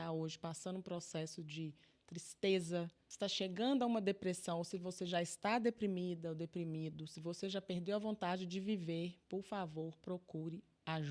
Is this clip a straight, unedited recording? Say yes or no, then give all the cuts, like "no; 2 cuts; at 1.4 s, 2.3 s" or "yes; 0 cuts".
no; 1 cut; at 3.0 s